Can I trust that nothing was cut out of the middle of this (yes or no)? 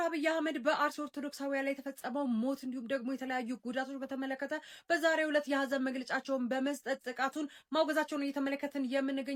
yes